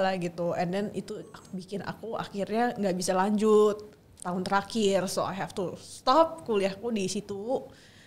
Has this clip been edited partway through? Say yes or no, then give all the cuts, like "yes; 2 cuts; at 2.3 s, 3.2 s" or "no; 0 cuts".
no; 0 cuts